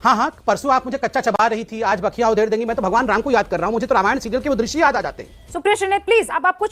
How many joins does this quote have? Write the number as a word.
zero